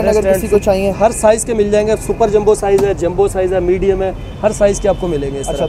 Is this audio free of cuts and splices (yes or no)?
yes